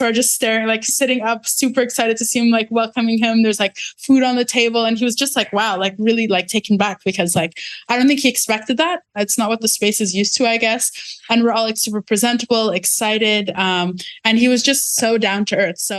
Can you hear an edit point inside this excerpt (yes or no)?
no